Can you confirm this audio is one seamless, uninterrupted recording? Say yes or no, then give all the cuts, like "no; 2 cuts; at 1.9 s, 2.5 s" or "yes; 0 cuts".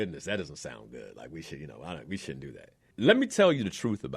no; 1 cut; at 2.7 s